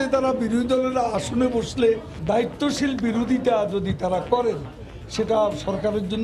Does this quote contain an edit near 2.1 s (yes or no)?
yes